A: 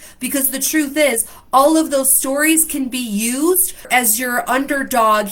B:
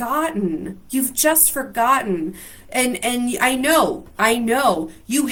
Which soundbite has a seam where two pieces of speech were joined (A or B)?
A